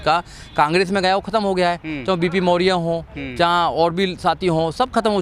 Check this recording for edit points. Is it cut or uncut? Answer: uncut